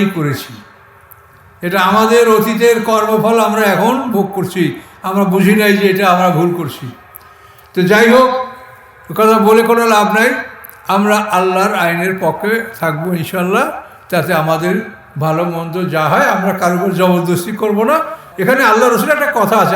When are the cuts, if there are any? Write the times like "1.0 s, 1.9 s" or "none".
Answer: 18.2 s

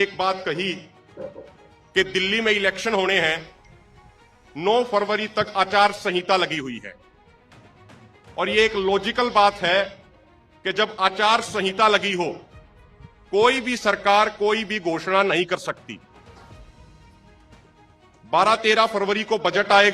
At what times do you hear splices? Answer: none

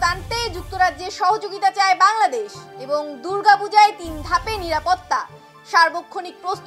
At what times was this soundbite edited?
none

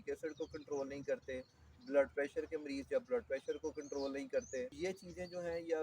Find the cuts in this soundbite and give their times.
4.7 s

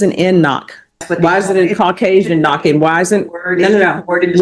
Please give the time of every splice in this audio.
1.0 s

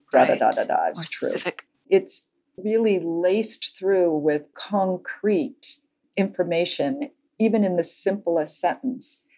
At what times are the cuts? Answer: 1.9 s, 4.6 s

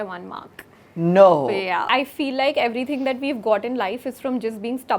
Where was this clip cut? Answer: 1.9 s

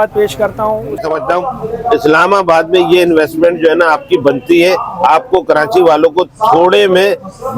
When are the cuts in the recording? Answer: 1.0 s

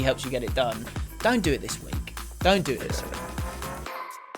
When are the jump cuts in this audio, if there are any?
3.0 s

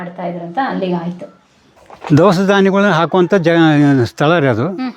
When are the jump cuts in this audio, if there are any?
1.6 s

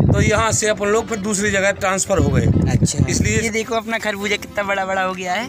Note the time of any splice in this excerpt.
3.4 s

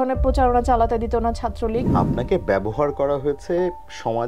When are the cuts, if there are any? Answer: 1.9 s

